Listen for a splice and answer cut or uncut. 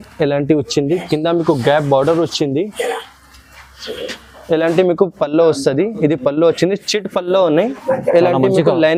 uncut